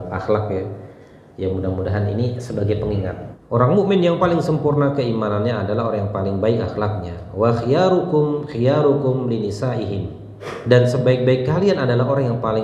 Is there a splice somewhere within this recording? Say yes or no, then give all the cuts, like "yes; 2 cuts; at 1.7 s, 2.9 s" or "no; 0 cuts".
yes; 2 cuts; at 3.3 s, 10.5 s